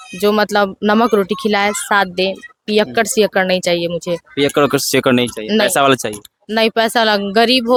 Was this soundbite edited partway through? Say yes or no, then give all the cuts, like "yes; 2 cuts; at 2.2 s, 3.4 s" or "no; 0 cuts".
no; 0 cuts